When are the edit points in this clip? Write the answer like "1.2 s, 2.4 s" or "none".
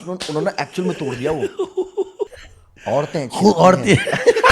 2.3 s